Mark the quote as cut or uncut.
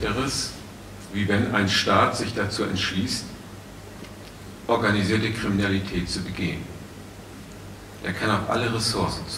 uncut